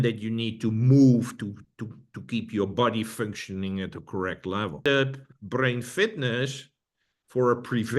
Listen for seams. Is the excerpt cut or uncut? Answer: cut